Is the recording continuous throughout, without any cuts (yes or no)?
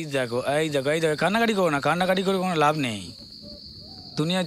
yes